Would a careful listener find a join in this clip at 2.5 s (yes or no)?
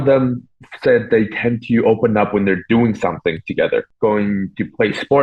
no